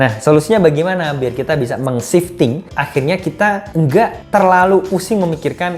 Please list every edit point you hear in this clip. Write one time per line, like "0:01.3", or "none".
0:02.7
0:04.0